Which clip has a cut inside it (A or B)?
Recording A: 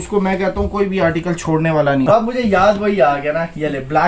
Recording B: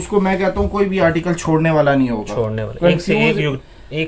A